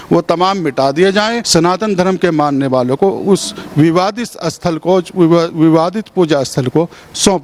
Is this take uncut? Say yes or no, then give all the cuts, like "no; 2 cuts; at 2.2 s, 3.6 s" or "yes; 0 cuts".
no; 1 cut; at 1.4 s